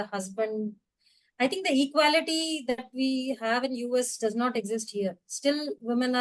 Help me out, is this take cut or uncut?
uncut